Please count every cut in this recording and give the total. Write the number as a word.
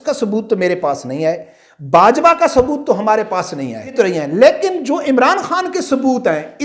one